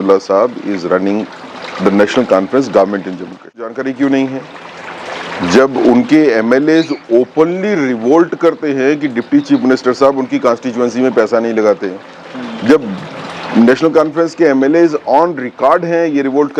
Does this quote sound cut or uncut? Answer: cut